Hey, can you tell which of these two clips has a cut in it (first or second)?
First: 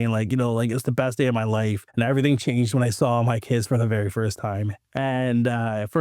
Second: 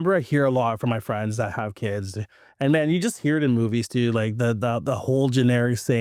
first